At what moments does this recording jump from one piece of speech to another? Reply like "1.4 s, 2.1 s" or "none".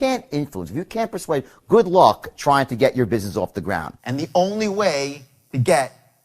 4.0 s